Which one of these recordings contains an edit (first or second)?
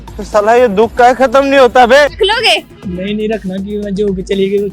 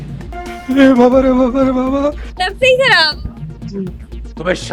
first